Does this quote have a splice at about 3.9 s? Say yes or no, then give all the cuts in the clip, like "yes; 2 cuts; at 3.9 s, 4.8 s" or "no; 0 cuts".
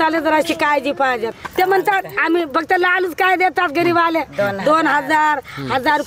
no; 1 cut; at 1.3 s